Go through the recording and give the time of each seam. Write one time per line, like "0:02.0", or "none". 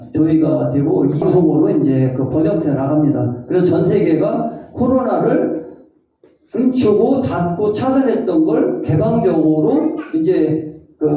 0:01.2